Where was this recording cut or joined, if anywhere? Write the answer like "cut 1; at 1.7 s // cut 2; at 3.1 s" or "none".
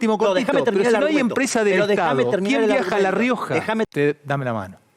cut 1; at 3.9 s

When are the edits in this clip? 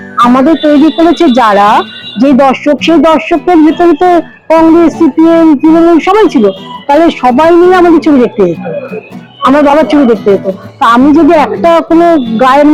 none

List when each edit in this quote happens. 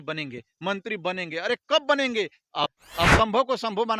cut 1; at 2.8 s

